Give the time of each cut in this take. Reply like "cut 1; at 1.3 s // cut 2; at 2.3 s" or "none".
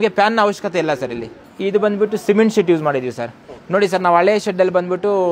none

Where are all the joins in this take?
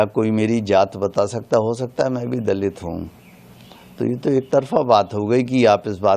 none

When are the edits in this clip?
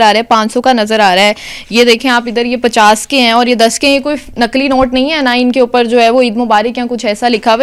none

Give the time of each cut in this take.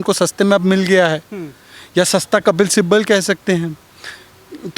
none

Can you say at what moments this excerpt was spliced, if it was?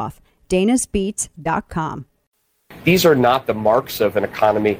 cut 1; at 2.7 s

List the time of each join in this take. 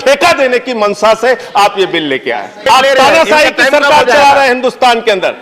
cut 1; at 2.6 s

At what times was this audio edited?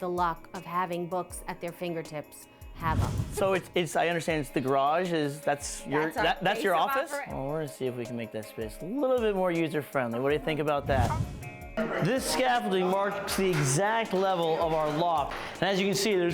cut 1; at 3.2 s // cut 2; at 7.2 s // cut 3; at 11.2 s

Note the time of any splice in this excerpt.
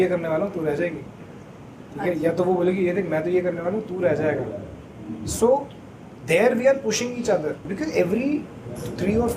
cut 1; at 7.7 s

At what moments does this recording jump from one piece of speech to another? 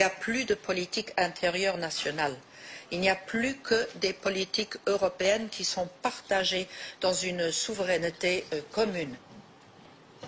none

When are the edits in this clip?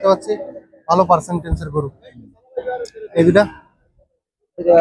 none

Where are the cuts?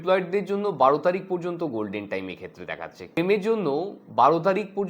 cut 1; at 3.2 s

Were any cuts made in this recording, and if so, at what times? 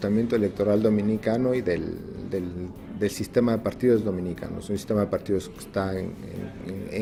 none

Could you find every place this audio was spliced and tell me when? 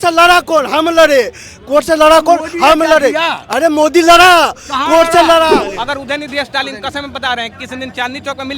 cut 1; at 5.7 s

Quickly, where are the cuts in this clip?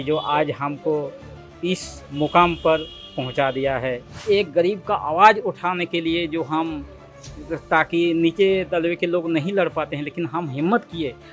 cut 1; at 4.2 s

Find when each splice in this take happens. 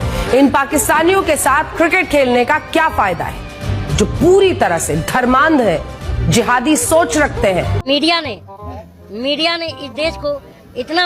cut 1; at 7.8 s

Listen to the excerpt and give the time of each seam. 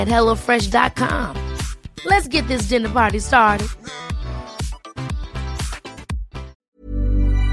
cut 1; at 6.6 s

